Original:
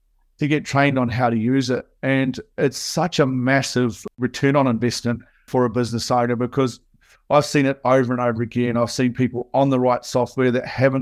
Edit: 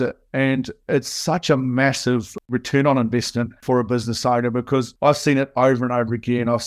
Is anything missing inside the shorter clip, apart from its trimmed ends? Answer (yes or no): yes